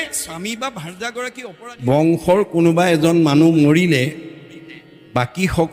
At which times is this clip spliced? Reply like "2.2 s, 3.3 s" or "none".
1.8 s